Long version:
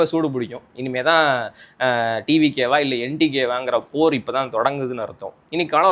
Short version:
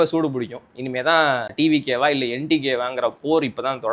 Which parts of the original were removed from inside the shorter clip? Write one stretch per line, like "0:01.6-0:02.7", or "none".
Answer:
0:01.5-0:02.2